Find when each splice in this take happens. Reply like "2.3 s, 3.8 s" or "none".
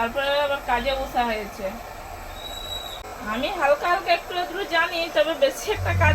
3.1 s